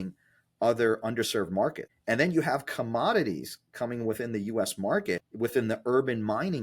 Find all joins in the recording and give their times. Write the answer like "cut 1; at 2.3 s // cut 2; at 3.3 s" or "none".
cut 1; at 1.9 s // cut 2; at 5.3 s